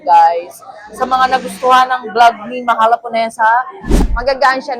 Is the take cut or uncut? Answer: cut